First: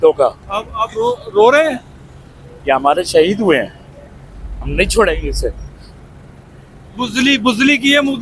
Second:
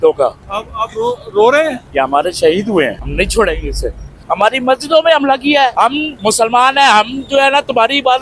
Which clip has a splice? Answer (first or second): second